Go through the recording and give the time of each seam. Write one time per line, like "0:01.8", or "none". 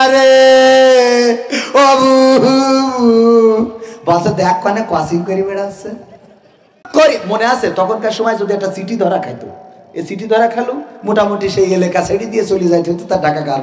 0:06.9